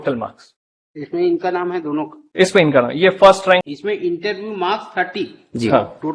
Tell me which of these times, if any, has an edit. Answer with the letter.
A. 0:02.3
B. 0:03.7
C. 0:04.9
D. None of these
B